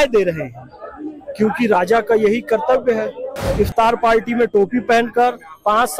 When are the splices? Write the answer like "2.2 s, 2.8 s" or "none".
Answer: 3.5 s